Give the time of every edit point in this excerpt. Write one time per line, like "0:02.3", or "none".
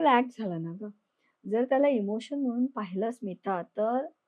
none